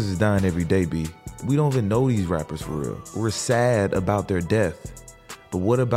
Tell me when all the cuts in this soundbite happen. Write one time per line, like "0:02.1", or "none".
0:01.4
0:03.0

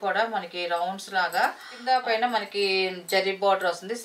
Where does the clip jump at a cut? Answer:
0:01.7

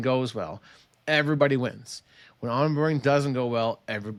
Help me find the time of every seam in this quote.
none

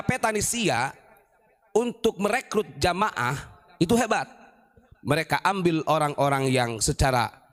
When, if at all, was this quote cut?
none

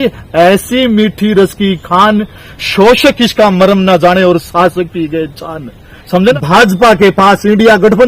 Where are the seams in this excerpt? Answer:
0:06.2

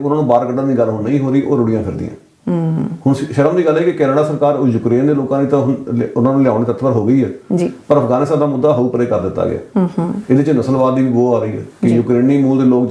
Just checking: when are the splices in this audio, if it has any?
none

